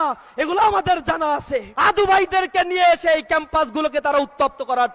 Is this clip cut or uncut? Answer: cut